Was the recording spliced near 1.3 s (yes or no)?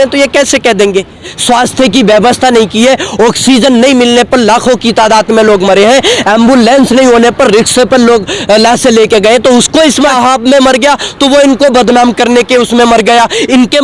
yes